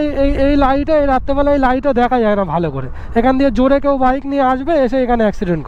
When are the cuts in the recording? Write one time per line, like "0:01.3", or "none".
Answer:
none

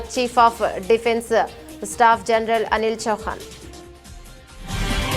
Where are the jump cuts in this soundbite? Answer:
none

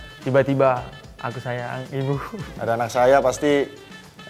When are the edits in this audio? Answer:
0:02.5

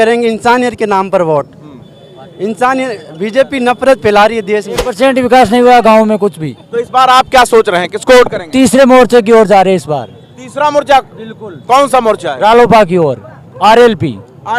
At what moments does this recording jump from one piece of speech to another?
0:04.9

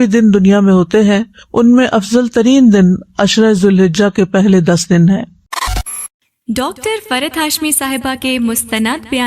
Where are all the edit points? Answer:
0:05.7

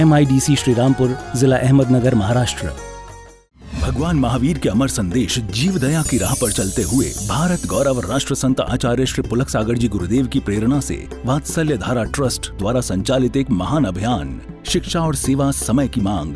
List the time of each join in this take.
0:03.7

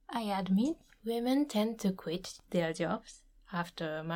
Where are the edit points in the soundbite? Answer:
0:00.9
0:02.3

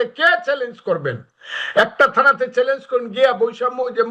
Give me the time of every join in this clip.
none

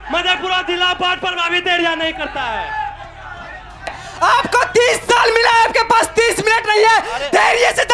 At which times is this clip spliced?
0:04.0

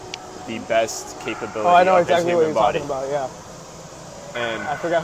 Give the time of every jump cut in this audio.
none

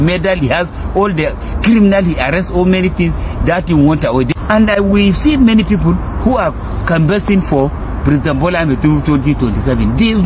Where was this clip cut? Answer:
0:04.3

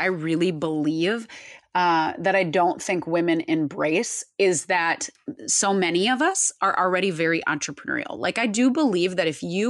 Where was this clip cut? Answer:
none

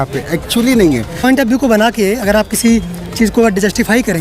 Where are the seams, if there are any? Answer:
0:01.2

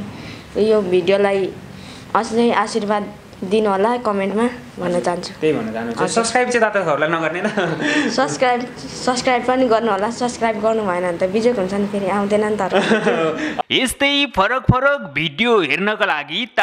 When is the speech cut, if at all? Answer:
0:13.5

